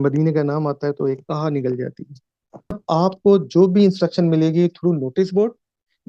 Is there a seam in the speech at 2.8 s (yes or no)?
yes